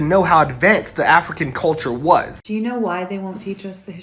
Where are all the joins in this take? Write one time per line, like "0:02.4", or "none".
0:02.4